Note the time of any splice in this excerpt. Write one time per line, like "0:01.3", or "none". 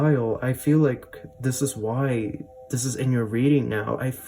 none